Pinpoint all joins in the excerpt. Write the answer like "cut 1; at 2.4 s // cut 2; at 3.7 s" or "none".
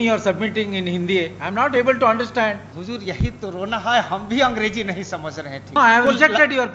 cut 1; at 2.7 s // cut 2; at 5.8 s